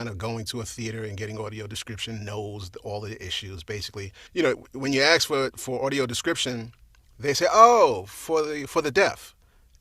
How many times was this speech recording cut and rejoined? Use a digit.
1